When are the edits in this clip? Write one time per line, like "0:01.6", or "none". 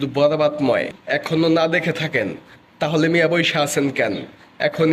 0:01.0